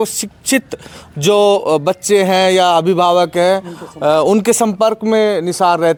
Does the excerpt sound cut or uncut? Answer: uncut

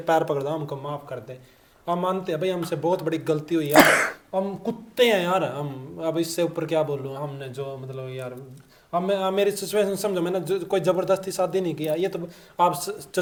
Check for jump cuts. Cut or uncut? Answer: uncut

